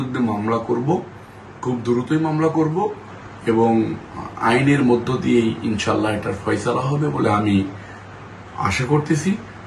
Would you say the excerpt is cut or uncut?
uncut